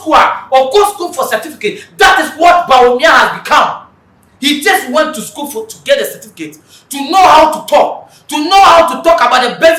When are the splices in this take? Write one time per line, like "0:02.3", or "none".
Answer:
none